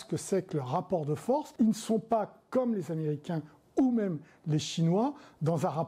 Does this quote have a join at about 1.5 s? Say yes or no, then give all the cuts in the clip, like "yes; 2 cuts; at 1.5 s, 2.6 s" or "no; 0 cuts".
yes; 1 cut; at 1.5 s